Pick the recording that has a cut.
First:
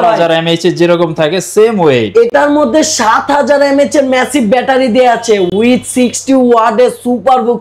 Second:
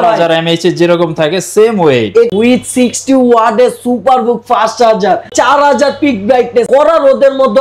second; 3 cuts; at 2.3 s, 5.3 s, 6.7 s

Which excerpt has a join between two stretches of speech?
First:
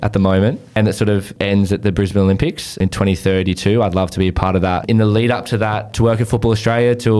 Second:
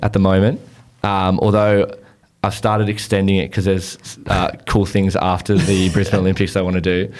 first; 4 cuts; at 1.2 s, 2.8 s, 4.8 s, 5.9 s

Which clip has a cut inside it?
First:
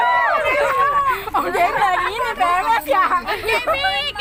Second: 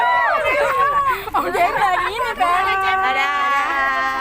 second; 1 cut; at 2.6 s

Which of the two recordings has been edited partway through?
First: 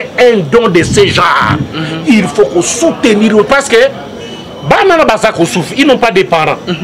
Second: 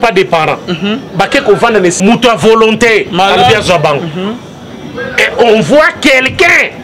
second; 1 cut; at 2.0 s

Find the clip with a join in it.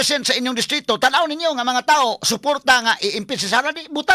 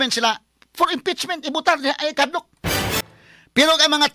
second; 1 cut; at 3.0 s

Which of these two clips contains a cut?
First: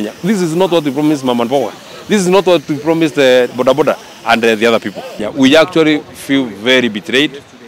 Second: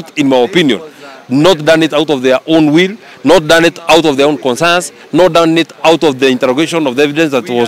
first; 1 cut; at 5.3 s

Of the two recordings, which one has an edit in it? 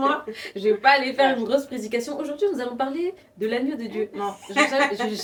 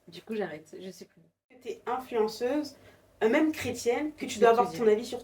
second; 1 cut; at 1.8 s

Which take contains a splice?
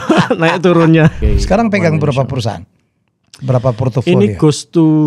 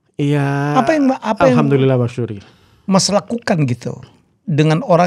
first; 1 cut; at 1.2 s

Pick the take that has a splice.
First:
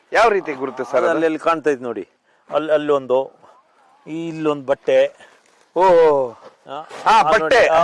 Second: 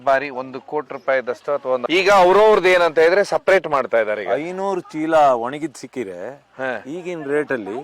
second; 1 cut; at 1.8 s

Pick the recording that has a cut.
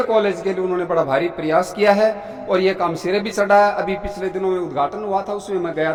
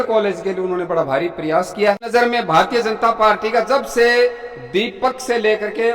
second; 1 cut; at 2.1 s

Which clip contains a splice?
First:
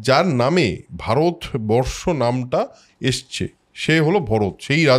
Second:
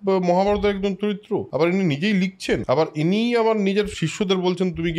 second; 3 cuts; at 1.5 s, 2.6 s, 4.0 s

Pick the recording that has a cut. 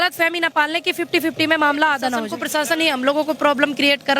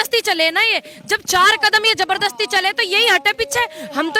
first; 1 cut; at 2.4 s

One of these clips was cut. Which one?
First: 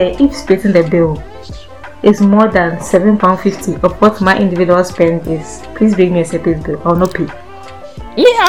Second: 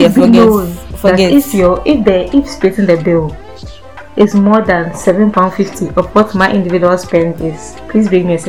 first; 1 cut; at 7.4 s

